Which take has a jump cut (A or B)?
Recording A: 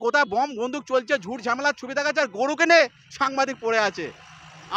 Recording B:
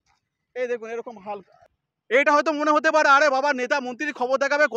B